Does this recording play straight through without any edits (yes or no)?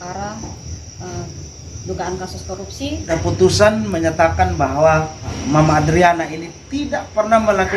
no